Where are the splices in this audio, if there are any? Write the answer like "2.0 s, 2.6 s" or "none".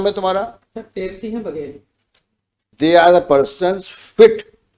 2.7 s